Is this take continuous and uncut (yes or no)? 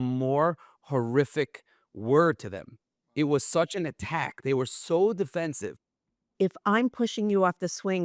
no